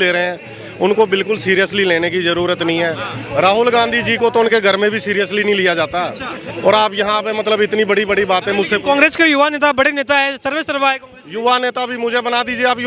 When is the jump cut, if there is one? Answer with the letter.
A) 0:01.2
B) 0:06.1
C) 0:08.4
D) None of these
D